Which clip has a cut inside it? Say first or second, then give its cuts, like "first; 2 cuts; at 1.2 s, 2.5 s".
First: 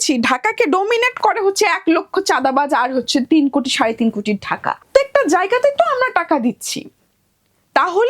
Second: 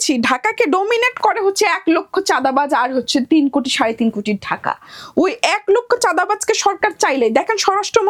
first; 1 cut; at 4.8 s